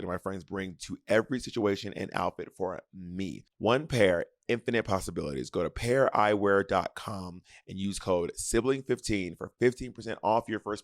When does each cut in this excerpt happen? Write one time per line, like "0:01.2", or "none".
0:03.4